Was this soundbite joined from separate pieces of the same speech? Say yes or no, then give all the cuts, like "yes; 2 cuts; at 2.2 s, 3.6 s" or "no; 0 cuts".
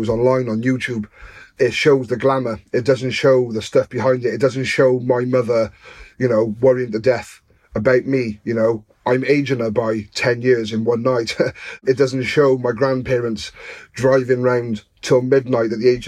yes; 2 cuts; at 1.5 s, 11.8 s